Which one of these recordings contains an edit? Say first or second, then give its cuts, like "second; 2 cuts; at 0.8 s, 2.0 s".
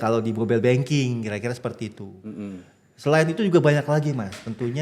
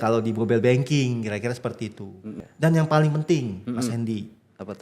second; 1 cut; at 2.4 s